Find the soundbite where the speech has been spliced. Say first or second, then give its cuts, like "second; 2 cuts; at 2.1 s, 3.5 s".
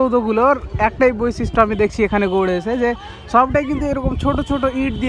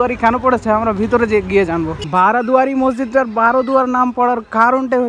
second; 1 cut; at 2.0 s